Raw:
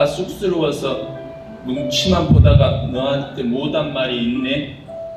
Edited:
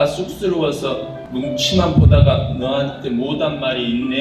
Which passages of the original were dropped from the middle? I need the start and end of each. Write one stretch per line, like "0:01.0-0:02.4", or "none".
0:01.2-0:01.5